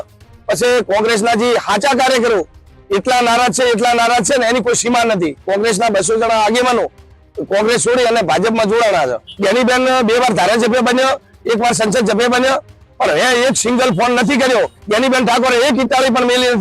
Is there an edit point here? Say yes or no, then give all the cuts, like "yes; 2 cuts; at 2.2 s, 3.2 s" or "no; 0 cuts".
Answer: yes; 3 cuts; at 5.4 s, 9.3 s, 14.8 s